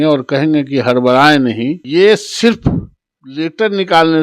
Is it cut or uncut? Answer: cut